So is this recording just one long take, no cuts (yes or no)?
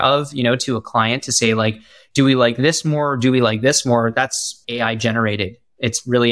no